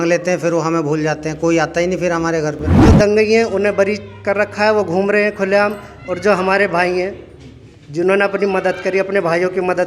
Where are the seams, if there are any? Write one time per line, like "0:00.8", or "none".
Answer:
0:02.7